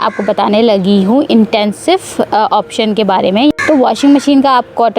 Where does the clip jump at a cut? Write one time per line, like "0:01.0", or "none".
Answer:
0:03.5